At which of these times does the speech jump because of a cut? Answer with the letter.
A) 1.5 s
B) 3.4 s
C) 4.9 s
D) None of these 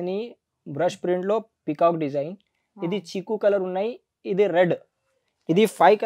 D